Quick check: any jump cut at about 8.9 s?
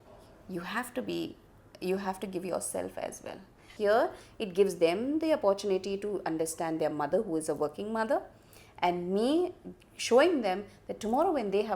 no; 1 cut; at 3.7 s

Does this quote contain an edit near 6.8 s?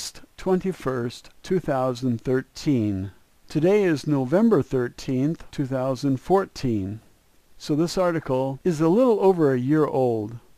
no; 1 cut; at 8.2 s

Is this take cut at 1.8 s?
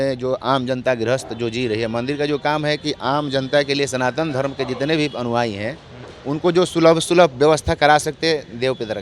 no; 0 cuts

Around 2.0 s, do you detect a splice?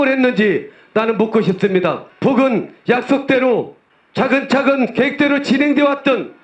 no; 0 cuts

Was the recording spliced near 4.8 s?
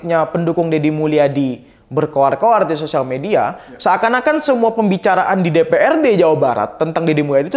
no; 0 cuts

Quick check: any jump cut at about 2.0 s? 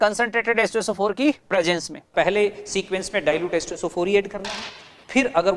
yes; 1 cut; at 2.0 s

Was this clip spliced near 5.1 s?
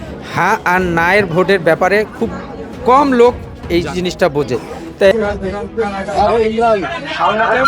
yes; 1 cut; at 5.1 s

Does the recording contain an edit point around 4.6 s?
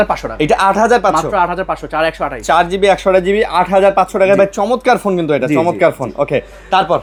no; 0 cuts

